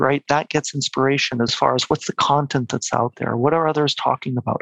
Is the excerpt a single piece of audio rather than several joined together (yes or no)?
no